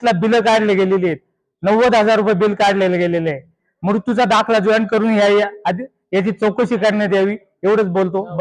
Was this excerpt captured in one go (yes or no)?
yes